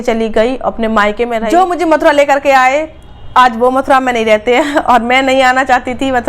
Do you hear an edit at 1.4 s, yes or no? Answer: yes